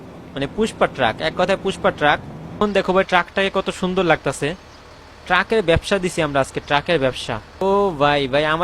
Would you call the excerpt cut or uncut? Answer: cut